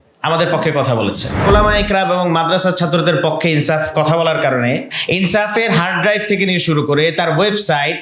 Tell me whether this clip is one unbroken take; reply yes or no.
no